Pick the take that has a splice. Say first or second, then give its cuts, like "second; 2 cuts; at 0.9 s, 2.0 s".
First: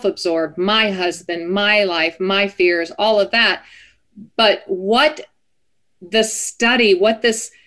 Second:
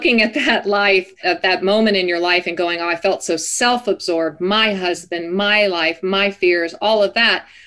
second; 1 cut; at 1.1 s